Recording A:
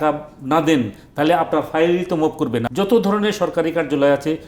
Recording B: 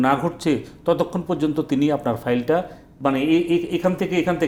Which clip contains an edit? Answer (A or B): A